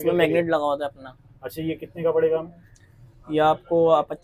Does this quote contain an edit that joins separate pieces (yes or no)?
no